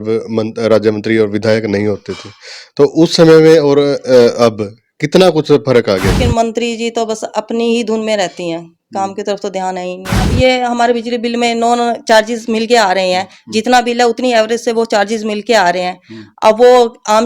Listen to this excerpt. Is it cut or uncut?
cut